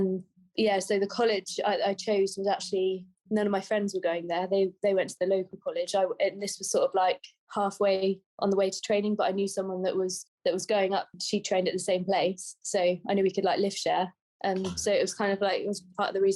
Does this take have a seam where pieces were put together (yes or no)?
no